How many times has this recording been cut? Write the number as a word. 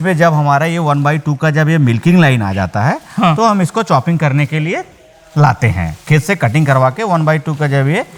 zero